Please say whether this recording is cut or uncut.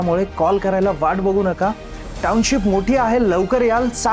uncut